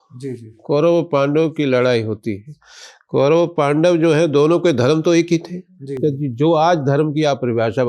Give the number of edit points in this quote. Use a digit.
0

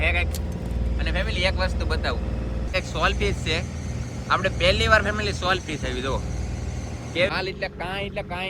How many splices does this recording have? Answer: 2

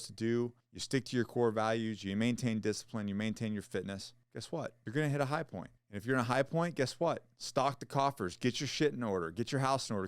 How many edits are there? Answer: 1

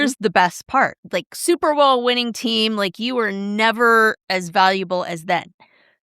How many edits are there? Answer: 1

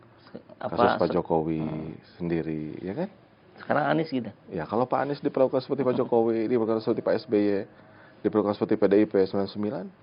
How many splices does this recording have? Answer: 0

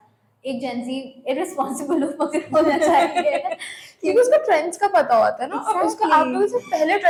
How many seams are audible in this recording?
0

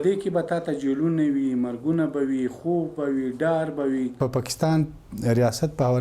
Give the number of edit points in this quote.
1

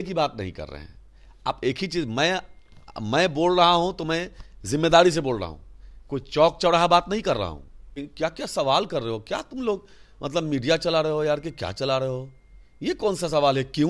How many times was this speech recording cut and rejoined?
1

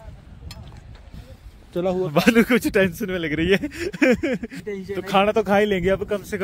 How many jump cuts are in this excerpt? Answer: 2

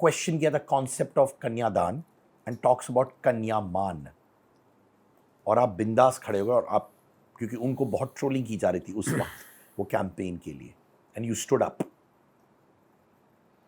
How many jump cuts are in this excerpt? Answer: 0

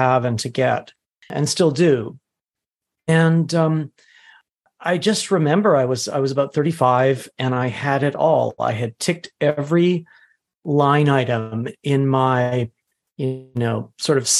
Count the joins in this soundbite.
2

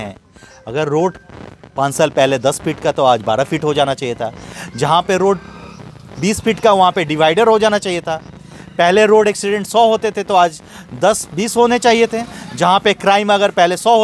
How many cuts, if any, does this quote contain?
0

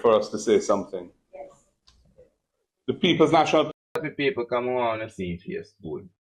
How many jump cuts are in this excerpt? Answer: 1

